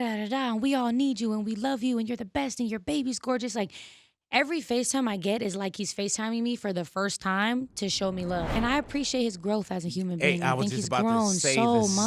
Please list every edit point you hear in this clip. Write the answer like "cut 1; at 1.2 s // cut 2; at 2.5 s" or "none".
cut 1; at 8.5 s